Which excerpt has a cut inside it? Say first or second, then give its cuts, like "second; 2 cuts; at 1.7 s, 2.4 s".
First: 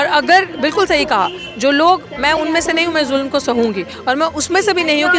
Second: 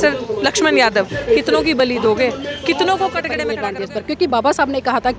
second; 1 cut; at 3.4 s